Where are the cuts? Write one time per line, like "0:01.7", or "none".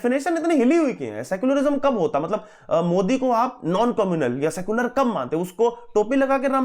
none

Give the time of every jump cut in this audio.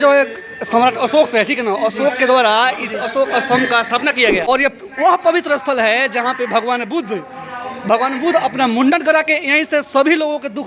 0:04.4

